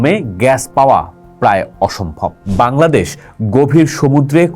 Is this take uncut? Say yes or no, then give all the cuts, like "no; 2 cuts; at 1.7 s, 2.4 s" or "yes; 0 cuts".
no; 1 cut; at 2.4 s